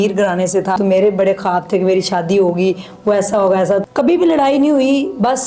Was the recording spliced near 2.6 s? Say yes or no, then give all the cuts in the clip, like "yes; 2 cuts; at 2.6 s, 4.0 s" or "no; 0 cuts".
no; 2 cuts; at 0.8 s, 3.8 s